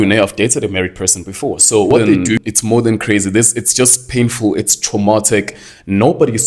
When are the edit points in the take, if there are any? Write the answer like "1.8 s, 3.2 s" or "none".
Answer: 2.3 s